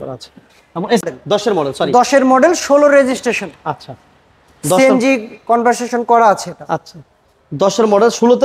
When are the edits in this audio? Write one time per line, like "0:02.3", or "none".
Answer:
0:01.0